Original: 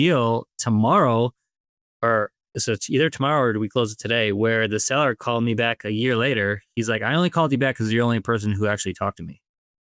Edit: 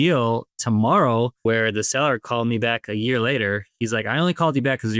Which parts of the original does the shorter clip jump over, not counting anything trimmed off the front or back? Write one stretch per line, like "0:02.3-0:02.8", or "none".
0:01.4-0:04.4